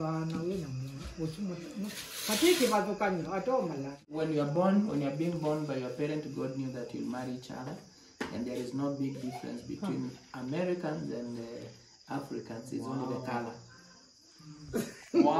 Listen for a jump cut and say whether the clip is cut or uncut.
cut